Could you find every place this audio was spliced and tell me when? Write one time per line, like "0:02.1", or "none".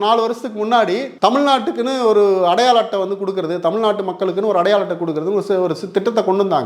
none